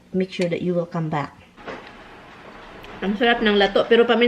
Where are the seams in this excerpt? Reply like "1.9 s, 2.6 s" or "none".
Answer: 1.6 s